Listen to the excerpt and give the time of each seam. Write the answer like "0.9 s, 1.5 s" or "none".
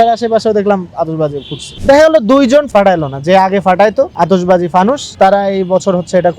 1.7 s, 2.7 s, 4.1 s, 5.1 s